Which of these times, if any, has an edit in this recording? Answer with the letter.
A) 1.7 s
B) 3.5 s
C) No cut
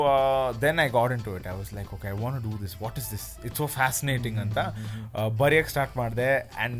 C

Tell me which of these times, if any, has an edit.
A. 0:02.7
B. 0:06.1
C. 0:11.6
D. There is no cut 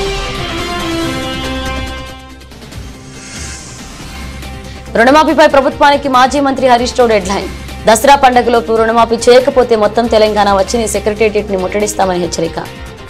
D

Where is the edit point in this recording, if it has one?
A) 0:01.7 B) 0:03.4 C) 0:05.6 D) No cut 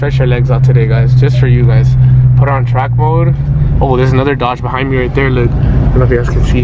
D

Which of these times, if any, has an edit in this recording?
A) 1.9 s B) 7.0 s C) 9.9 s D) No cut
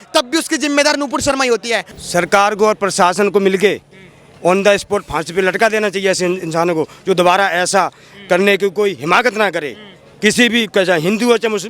A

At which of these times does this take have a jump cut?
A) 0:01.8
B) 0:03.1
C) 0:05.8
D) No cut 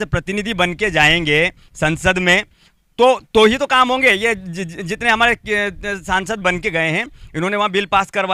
D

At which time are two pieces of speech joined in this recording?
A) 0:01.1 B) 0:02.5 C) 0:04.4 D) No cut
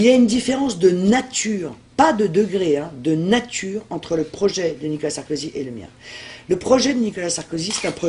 B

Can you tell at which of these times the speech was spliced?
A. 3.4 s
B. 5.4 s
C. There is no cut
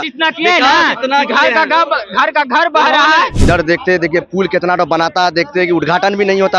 A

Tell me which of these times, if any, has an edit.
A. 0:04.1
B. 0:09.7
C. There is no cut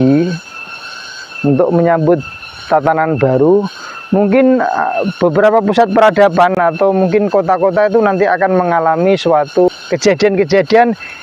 B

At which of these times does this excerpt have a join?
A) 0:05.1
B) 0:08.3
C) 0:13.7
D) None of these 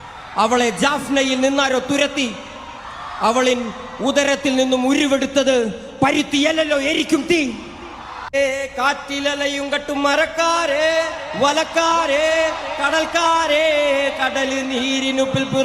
B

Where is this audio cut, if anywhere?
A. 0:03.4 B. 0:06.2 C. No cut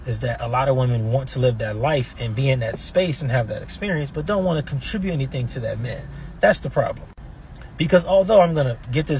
B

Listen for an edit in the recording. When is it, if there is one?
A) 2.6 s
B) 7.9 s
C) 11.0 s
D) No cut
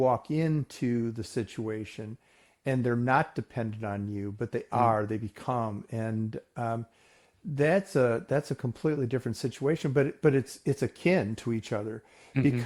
D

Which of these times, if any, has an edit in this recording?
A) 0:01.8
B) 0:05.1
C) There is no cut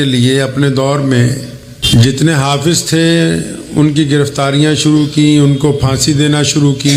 A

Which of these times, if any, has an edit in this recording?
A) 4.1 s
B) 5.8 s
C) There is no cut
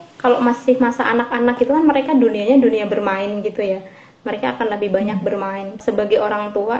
B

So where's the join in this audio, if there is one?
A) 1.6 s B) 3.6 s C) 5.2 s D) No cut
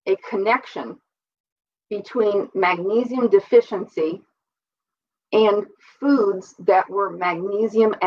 D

